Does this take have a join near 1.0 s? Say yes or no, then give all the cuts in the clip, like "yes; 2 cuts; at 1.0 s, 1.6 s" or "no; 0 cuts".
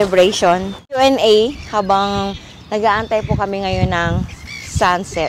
yes; 1 cut; at 1.0 s